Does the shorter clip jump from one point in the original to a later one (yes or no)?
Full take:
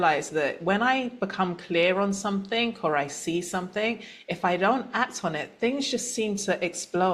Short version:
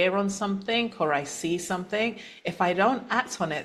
no